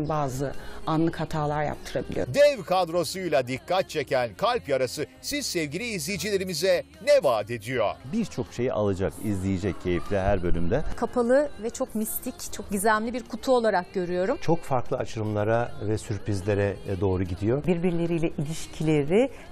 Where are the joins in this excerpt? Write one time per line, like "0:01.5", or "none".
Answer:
none